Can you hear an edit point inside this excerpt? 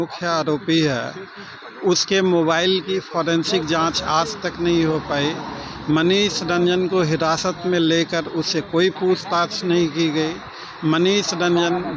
no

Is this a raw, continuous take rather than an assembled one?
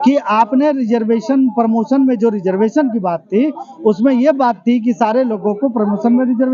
yes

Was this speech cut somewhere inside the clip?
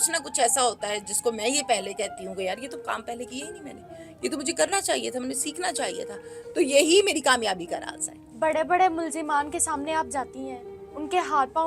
no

